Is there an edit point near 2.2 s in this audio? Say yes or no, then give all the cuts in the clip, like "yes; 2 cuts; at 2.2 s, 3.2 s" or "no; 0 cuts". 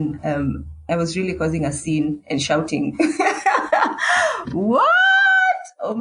no; 0 cuts